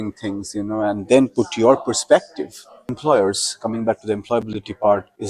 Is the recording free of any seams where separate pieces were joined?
no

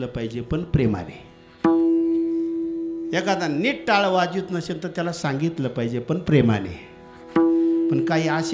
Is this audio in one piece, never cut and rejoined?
yes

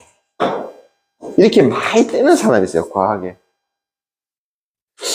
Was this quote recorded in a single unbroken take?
yes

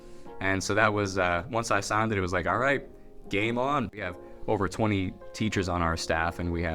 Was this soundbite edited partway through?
yes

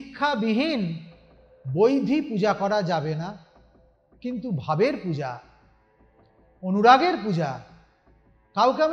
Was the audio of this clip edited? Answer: no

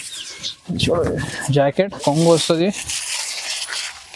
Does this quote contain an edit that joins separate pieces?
yes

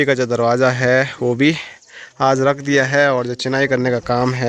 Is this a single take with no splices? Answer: yes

